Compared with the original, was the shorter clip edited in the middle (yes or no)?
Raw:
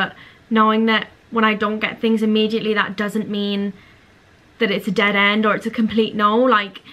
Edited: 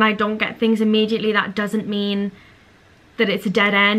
no